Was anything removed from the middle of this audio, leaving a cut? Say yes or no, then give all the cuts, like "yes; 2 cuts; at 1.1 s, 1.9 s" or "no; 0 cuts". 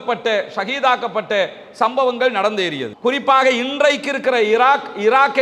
yes; 1 cut; at 2.9 s